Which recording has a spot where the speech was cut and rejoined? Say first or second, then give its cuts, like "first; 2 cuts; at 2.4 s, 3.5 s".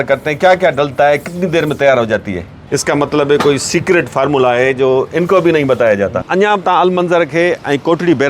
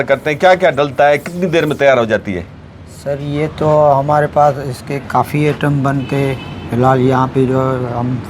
first; 2 cuts; at 2.6 s, 6.3 s